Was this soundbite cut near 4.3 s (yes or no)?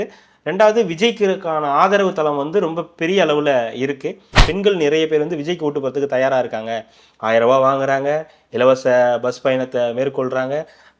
yes